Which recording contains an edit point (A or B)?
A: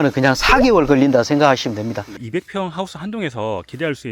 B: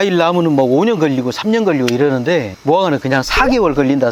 A